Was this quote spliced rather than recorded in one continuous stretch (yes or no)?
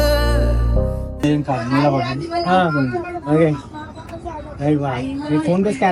no